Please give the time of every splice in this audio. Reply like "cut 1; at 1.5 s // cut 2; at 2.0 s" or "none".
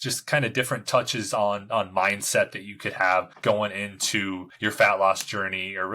cut 1; at 3.3 s // cut 2; at 4.5 s